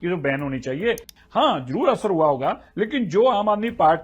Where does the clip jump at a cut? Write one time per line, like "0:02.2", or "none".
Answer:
0:01.1